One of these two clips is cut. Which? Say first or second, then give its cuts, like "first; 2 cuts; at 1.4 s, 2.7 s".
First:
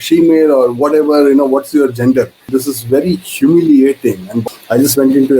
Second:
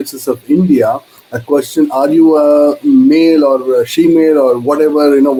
first; 2 cuts; at 2.5 s, 4.3 s